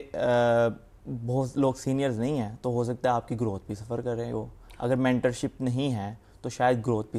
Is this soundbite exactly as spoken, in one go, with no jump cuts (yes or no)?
yes